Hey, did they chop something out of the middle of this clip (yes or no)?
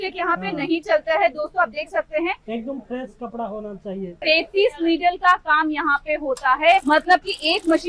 yes